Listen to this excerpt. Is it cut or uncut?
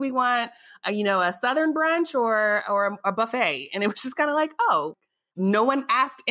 uncut